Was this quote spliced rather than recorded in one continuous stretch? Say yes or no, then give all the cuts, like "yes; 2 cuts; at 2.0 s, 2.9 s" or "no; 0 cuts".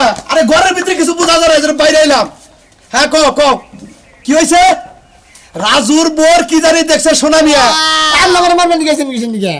yes; 1 cut; at 8.0 s